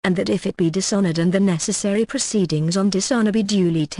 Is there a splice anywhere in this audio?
no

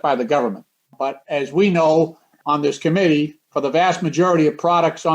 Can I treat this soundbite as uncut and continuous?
no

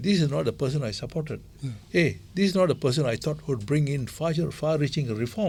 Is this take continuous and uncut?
yes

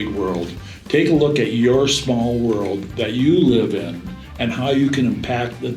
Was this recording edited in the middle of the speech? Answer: no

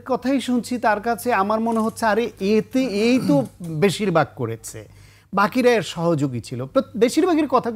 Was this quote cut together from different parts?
no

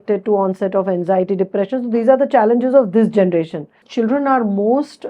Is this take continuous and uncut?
no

